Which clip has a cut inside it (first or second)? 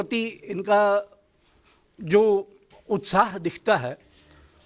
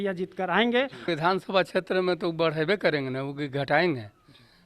second